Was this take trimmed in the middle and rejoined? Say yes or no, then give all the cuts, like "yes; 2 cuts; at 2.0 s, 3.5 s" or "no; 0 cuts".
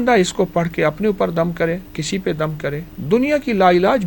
yes; 2 cuts; at 1.9 s, 2.9 s